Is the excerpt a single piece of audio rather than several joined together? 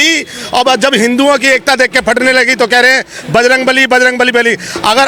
yes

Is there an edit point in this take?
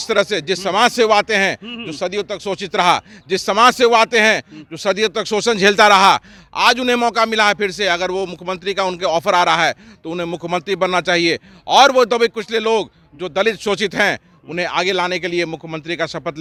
no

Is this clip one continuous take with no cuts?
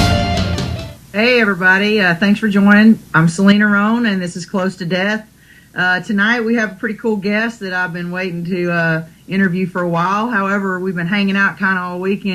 yes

